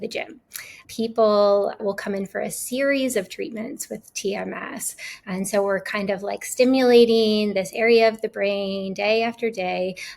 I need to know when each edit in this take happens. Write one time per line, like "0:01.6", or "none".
0:00.8
0:01.8